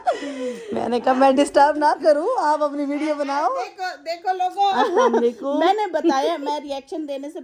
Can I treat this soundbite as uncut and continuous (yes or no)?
yes